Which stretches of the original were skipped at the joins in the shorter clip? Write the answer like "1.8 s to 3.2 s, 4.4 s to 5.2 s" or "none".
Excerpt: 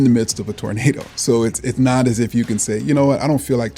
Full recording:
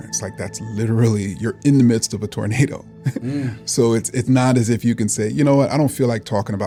2.8 s to 3.6 s